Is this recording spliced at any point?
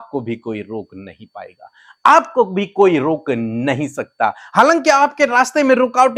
no; 0 cuts

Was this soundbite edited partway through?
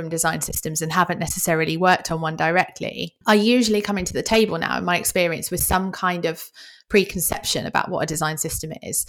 yes; 1 cut; at 3.1 s

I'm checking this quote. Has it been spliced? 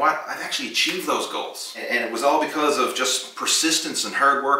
yes; 1 cut; at 1.8 s

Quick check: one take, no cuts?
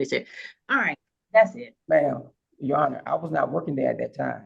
yes; 0 cuts

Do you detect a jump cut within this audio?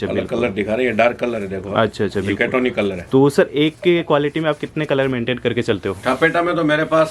no; 0 cuts

